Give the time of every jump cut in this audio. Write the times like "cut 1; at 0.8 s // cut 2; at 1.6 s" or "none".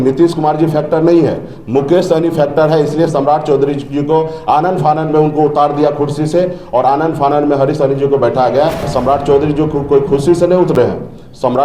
cut 1; at 8.9 s

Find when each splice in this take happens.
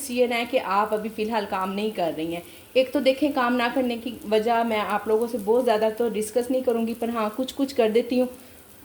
none

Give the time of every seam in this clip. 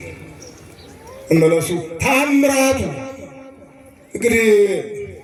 none

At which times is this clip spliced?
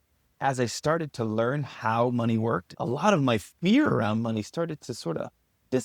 cut 1; at 2.7 s

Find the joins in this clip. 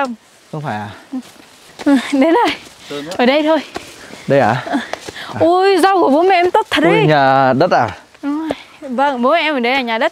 cut 1; at 1.7 s

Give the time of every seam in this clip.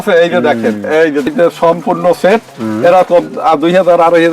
cut 1; at 1.3 s

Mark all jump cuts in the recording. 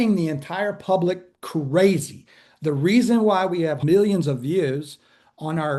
cut 1; at 3.8 s

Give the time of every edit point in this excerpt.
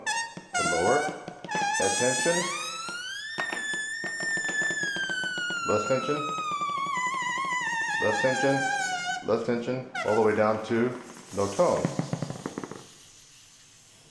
cut 1; at 12.3 s

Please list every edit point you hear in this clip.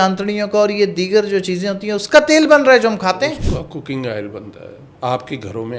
cut 1; at 4.9 s

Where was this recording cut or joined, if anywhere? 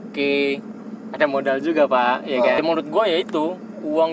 cut 1; at 2.6 s

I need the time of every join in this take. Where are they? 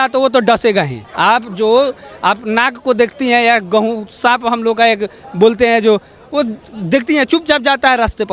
none

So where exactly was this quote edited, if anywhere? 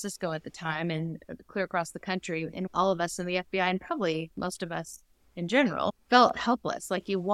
cut 1; at 2.6 s // cut 2; at 6.0 s

